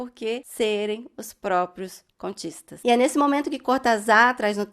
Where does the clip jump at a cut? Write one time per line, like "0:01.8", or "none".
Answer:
0:02.8